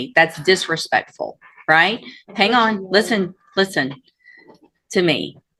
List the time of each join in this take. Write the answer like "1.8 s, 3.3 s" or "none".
none